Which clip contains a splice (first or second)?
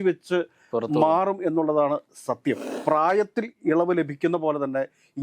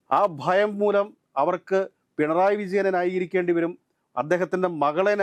first